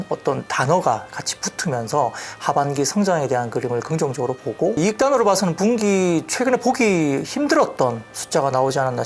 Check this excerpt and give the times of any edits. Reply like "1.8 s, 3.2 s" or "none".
4.8 s